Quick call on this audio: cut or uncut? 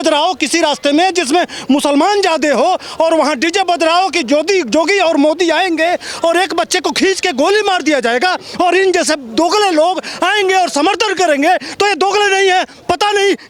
uncut